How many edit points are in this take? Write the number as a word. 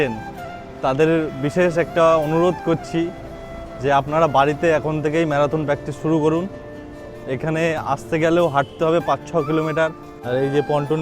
one